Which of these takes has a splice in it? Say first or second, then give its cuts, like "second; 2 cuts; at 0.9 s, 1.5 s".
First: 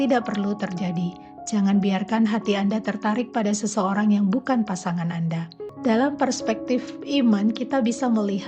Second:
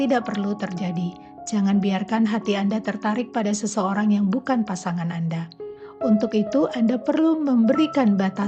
first; 1 cut; at 5.6 s